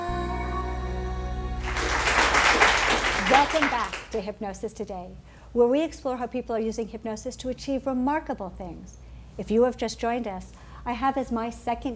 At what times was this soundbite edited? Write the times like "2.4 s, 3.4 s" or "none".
none